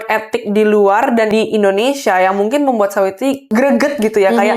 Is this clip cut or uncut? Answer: cut